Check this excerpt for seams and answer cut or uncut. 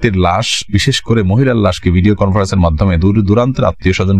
uncut